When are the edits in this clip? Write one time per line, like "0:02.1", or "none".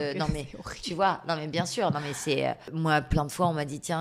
0:02.7

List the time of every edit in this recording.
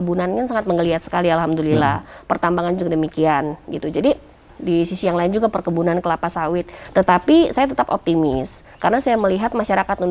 0:04.5
0:06.8

